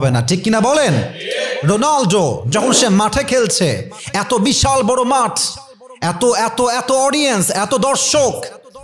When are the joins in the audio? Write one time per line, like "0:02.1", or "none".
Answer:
none